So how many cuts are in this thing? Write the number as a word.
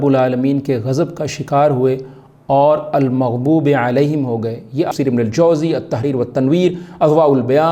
one